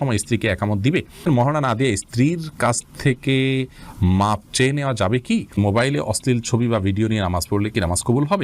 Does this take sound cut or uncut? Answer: cut